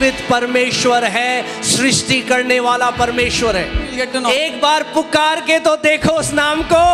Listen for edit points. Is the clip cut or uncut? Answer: cut